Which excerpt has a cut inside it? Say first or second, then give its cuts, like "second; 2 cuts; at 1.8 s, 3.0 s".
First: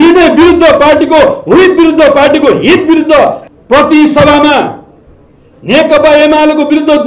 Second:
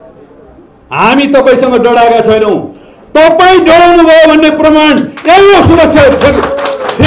first; 1 cut; at 3.5 s